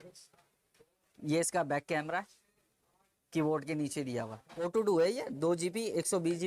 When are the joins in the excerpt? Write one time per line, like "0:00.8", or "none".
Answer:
0:04.5